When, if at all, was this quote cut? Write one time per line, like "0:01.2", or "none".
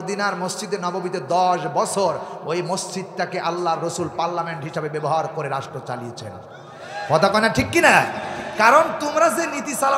none